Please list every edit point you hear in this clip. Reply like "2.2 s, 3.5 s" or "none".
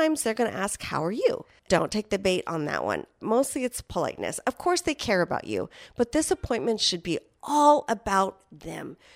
1.6 s, 3.2 s